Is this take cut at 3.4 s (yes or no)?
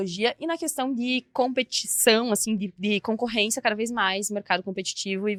no